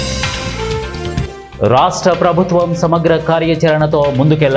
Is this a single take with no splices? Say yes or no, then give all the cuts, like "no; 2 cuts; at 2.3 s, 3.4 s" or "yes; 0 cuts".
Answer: yes; 0 cuts